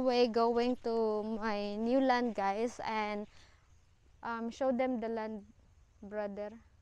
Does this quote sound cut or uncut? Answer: uncut